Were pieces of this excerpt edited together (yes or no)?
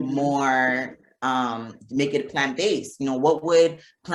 no